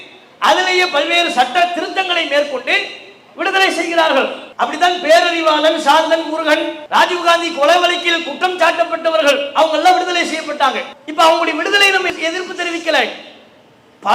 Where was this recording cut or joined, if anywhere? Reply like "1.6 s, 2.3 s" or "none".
4.4 s